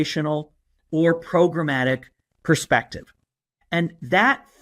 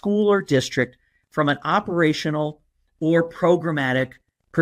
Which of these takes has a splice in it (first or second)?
first